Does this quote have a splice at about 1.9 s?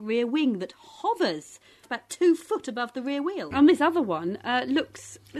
yes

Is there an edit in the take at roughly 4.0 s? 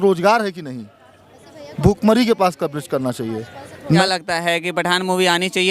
yes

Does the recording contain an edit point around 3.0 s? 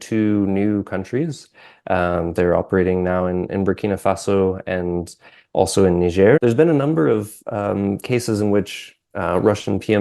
no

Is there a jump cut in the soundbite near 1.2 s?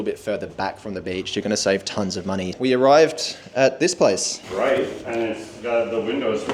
no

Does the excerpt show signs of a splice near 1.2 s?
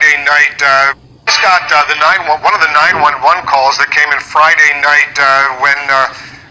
yes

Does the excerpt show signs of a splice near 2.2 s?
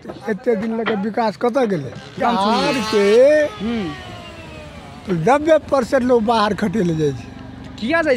yes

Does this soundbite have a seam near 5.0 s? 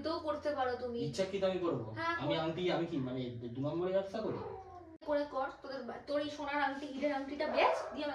yes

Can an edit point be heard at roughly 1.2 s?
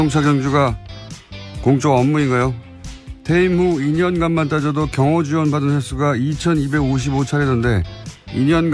yes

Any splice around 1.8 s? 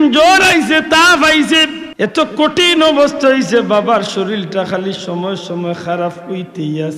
yes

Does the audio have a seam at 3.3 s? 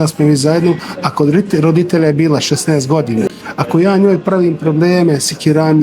yes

